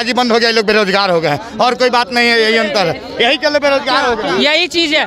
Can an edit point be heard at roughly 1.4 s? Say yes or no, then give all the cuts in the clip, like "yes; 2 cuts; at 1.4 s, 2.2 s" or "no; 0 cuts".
no; 0 cuts